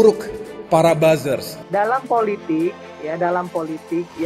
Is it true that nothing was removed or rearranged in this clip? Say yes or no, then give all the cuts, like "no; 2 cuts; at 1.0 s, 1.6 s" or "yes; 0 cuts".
no; 1 cut; at 1.5 s